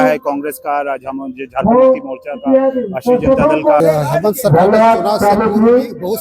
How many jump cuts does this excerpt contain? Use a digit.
1